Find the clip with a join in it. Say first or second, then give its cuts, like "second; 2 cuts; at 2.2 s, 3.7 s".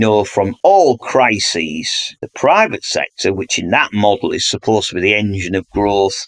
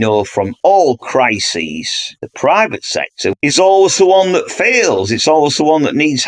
second; 1 cut; at 3.4 s